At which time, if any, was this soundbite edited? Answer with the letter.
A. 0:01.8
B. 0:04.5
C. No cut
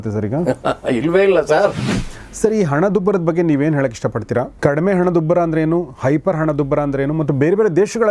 A